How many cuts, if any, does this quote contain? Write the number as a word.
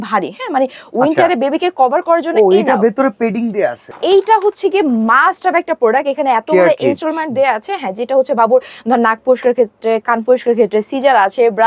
one